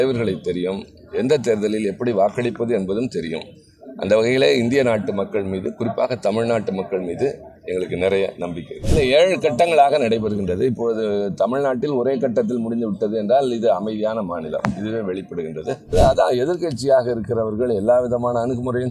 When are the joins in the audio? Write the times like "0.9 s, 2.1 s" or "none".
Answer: 8.9 s, 15.9 s